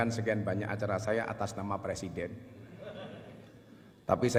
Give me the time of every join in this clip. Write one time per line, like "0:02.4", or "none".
none